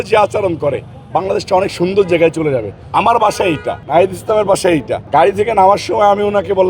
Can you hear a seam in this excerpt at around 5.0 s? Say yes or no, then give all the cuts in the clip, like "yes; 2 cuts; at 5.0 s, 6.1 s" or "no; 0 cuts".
yes; 3 cuts; at 2.8 s, 3.7 s, 5.0 s